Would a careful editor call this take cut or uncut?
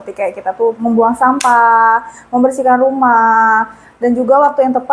uncut